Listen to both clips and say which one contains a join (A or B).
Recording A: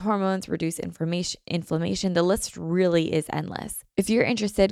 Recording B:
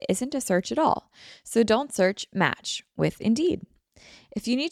A